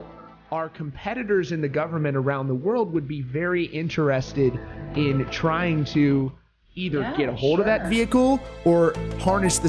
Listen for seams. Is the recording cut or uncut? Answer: uncut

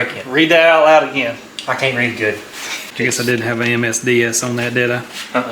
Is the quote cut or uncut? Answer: cut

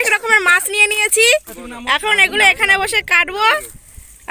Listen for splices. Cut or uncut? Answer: cut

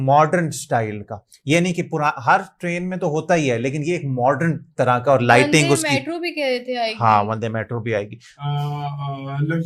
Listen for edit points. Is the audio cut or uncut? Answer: cut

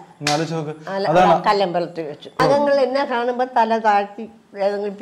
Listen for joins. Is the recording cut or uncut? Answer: cut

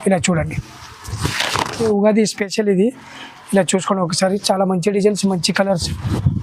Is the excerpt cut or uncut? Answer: cut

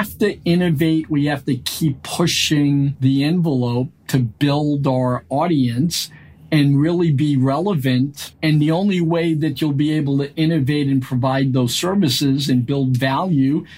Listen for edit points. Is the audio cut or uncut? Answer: cut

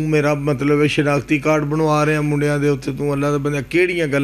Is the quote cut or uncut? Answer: uncut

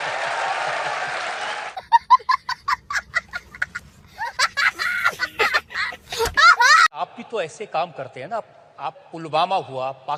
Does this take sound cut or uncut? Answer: uncut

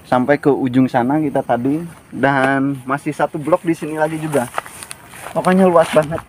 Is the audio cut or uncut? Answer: uncut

